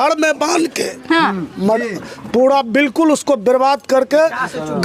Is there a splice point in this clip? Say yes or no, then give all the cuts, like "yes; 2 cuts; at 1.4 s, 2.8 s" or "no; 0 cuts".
no; 0 cuts